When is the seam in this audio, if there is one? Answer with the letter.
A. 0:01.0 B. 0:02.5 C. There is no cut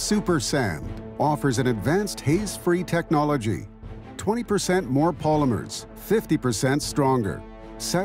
A